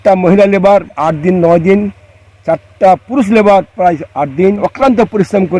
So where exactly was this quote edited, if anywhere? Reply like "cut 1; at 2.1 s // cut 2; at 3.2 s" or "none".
cut 1; at 1.0 s // cut 2; at 4.6 s